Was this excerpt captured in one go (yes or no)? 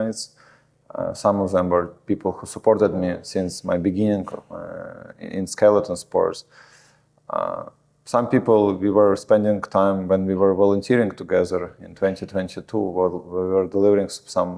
yes